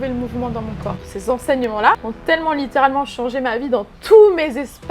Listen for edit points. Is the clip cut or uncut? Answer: cut